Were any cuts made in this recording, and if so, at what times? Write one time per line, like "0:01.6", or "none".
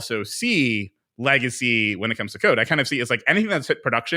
none